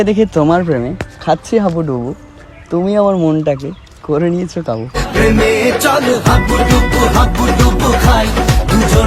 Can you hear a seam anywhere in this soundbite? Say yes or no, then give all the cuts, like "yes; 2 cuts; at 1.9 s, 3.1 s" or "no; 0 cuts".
no; 0 cuts